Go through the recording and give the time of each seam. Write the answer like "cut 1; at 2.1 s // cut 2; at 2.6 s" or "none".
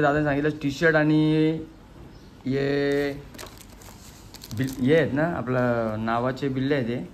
none